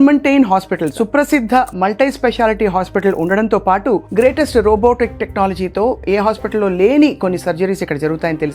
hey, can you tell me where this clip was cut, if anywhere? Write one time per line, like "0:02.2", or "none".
0:00.9